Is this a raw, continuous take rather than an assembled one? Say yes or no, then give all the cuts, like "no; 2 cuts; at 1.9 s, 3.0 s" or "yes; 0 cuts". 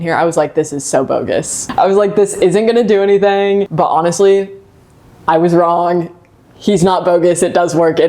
no; 2 cuts; at 1.6 s, 3.7 s